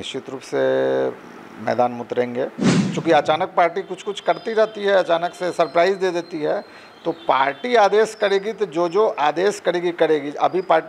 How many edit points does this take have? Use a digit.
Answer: 1